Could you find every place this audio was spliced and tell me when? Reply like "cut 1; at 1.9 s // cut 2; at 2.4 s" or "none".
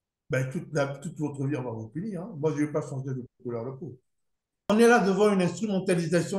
cut 1; at 4.2 s